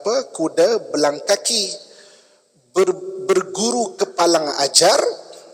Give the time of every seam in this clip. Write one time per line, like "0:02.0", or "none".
none